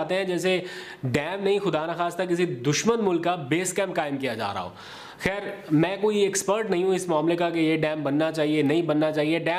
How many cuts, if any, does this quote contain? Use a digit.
0